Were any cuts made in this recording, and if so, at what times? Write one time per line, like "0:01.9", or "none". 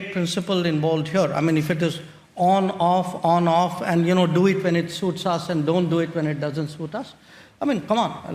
none